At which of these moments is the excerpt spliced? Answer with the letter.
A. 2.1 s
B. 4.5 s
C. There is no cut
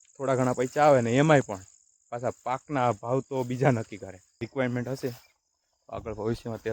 B